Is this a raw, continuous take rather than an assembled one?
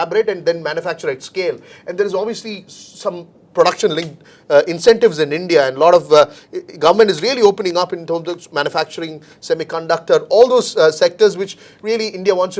yes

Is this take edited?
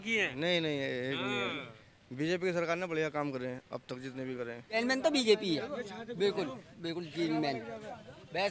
yes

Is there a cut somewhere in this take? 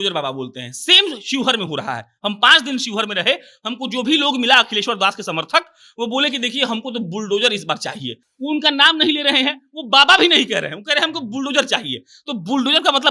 no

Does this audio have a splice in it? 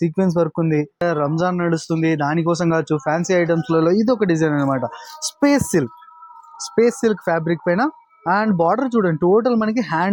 yes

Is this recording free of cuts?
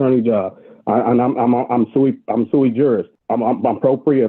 no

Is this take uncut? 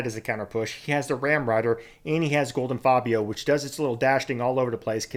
yes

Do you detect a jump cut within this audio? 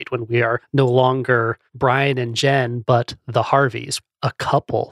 yes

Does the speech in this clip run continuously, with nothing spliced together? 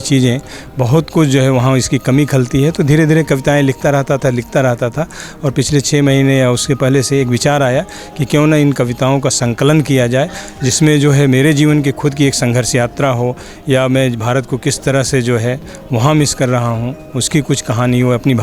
yes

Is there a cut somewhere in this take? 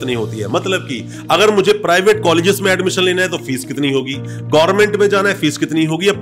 no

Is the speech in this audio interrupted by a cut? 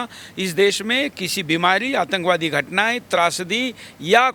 no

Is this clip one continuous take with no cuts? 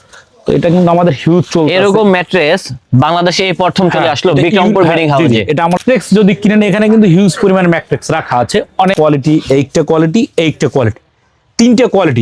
no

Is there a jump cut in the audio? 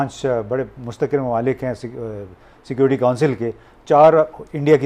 no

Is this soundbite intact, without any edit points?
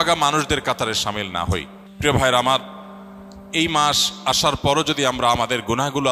no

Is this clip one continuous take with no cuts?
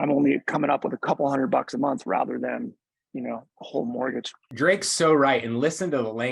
no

